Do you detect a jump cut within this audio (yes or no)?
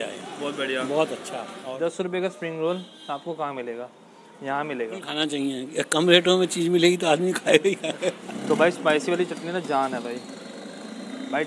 yes